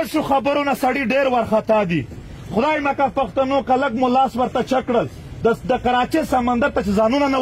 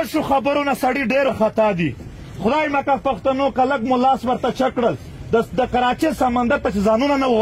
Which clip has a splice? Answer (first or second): second